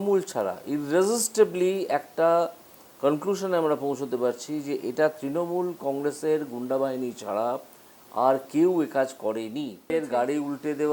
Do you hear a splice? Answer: yes; 1 cut; at 9.9 s

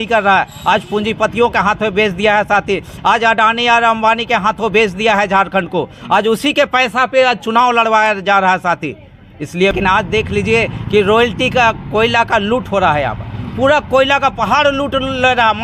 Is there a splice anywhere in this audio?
yes; 1 cut; at 9.7 s

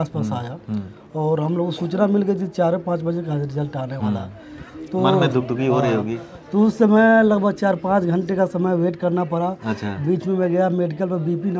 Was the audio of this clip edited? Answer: no; 0 cuts

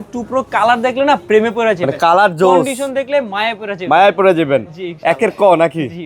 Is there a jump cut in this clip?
no; 0 cuts

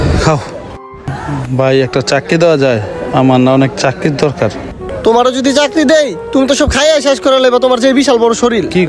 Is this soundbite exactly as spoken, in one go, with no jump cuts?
no; 2 cuts; at 1.1 s, 4.7 s

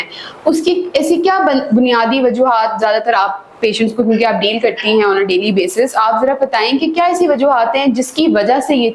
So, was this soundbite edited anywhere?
no; 0 cuts

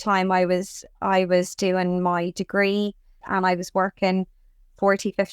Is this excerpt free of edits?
no; 1 cut; at 3.1 s

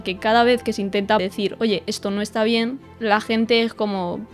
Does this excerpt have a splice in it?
yes; 1 cut; at 1.2 s

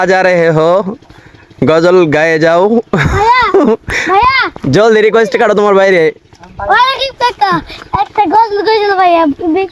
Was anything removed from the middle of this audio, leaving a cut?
no; 0 cuts

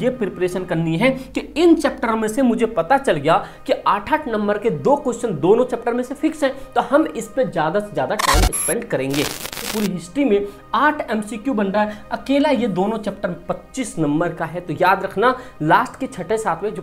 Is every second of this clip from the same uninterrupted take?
no; 1 cut; at 9.7 s

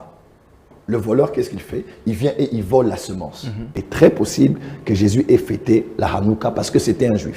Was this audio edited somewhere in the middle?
yes; 1 cut; at 3.8 s

